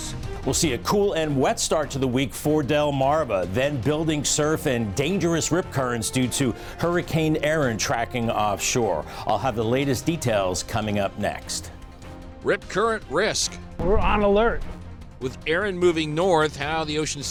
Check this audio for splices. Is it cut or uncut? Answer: uncut